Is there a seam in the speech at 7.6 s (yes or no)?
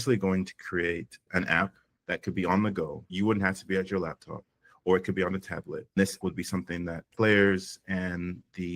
no